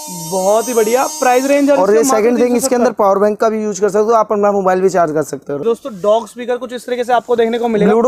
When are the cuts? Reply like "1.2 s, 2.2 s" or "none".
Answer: 5.6 s